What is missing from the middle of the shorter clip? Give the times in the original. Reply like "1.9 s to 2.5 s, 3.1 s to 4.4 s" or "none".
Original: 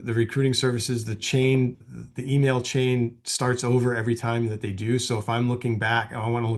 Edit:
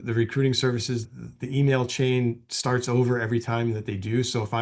1.1 s to 1.9 s